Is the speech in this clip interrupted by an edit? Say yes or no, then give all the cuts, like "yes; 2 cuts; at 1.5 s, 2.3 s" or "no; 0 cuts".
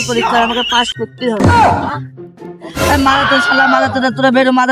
no; 0 cuts